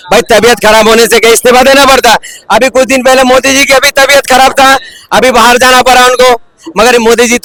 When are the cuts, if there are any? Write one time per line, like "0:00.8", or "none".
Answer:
none

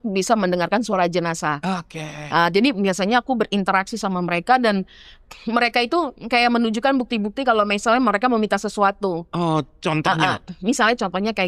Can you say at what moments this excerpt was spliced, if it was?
none

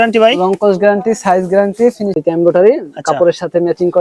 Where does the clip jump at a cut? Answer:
0:02.2

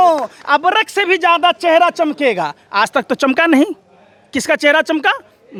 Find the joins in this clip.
none

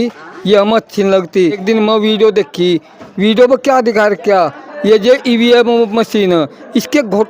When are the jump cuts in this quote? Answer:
0:01.6

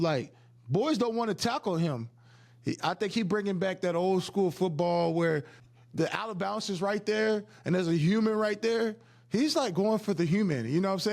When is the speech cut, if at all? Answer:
0:05.6

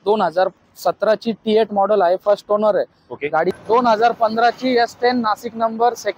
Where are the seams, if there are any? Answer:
0:03.6

